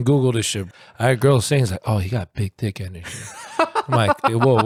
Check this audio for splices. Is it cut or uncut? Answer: uncut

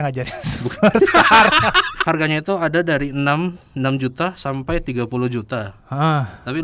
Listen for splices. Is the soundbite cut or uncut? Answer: cut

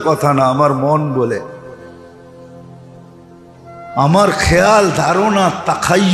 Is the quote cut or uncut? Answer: cut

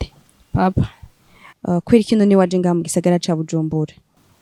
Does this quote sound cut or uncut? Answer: uncut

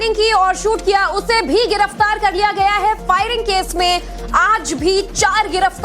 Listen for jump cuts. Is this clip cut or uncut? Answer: cut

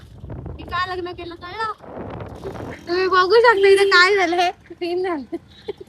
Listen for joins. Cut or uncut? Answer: cut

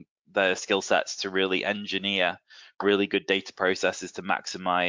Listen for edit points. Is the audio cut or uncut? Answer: uncut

